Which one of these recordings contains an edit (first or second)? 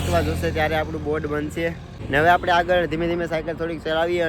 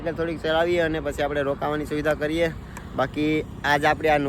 first